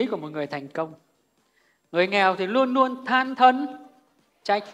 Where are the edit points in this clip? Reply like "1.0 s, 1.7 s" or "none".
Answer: none